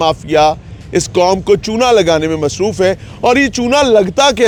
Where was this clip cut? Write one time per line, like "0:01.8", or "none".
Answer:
none